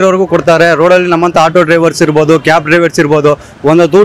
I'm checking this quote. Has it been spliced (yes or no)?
no